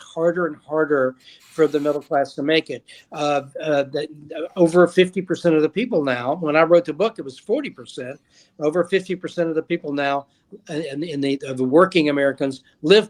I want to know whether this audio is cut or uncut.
uncut